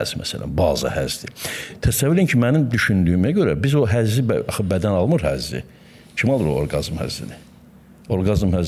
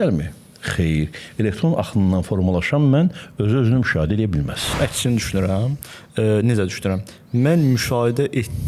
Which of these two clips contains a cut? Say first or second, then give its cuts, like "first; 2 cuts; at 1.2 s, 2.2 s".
second; 1 cut; at 4.8 s